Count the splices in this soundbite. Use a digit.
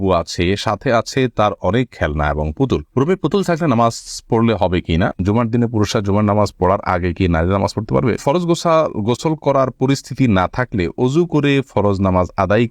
2